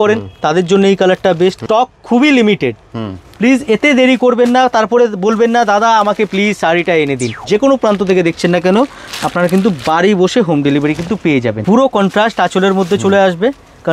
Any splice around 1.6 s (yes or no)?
yes